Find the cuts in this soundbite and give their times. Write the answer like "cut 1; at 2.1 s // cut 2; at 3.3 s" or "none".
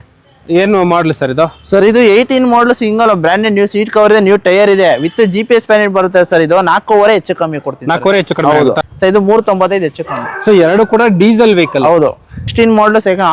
cut 1; at 8.9 s // cut 2; at 12.4 s